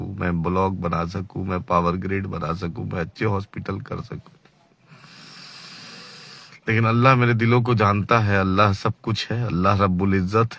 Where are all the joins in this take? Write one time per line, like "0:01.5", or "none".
none